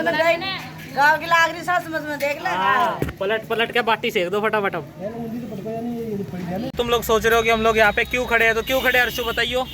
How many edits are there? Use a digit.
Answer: 1